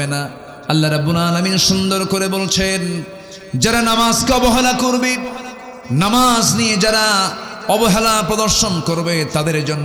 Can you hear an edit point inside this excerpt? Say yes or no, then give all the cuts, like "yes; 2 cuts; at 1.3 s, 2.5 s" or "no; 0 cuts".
no; 0 cuts